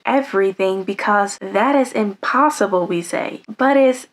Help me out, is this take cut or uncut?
cut